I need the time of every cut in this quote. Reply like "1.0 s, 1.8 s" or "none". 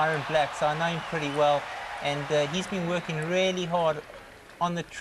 none